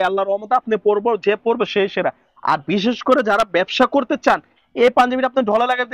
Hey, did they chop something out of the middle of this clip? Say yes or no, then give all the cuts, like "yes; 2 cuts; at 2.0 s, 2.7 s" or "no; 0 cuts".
no; 0 cuts